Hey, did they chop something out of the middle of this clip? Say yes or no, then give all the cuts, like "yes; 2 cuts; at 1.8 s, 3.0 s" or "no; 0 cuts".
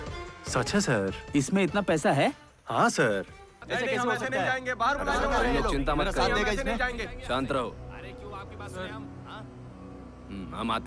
yes; 2 cuts; at 3.5 s, 5.3 s